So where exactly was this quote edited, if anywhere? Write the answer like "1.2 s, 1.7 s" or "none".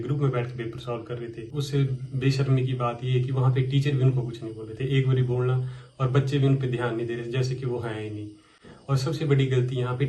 1.5 s